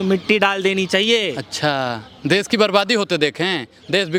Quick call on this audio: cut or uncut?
uncut